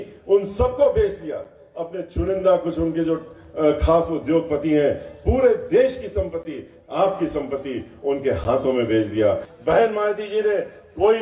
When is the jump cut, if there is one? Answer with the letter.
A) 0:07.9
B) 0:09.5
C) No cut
B